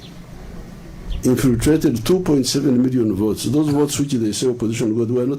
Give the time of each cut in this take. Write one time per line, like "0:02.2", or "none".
0:03.7